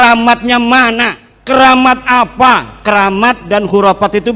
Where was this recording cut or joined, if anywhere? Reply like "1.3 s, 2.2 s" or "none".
1.3 s